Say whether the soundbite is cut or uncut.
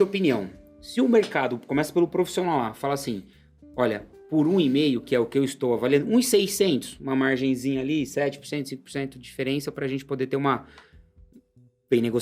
uncut